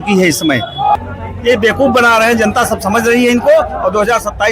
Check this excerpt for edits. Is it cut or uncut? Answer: cut